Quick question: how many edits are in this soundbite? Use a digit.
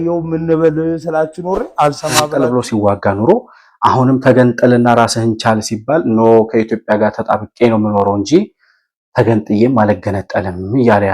1